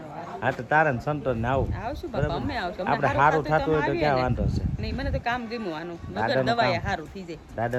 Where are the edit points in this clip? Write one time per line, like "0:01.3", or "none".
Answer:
none